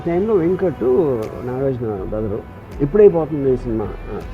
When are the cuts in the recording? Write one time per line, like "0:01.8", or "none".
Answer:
0:02.6